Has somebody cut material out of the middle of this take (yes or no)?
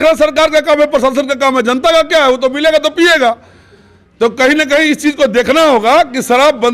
no